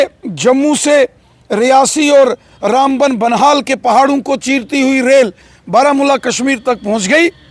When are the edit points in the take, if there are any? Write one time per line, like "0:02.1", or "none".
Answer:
none